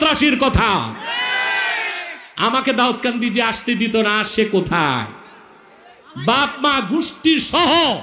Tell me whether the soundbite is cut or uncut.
uncut